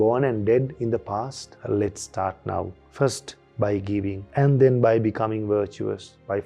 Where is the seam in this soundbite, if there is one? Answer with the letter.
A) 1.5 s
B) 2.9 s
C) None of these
A